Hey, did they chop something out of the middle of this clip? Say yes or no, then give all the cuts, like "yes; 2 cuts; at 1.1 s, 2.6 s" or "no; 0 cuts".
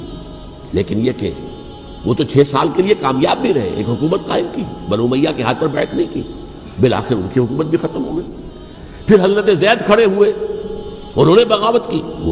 no; 0 cuts